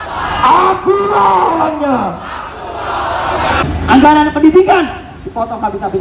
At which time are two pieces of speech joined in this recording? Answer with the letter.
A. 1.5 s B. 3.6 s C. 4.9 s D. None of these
B